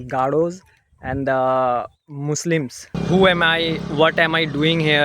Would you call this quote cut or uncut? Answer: cut